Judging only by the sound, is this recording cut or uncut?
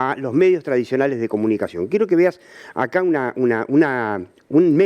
uncut